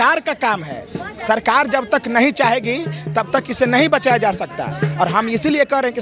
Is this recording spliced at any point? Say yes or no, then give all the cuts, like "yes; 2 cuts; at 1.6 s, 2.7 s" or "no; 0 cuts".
no; 0 cuts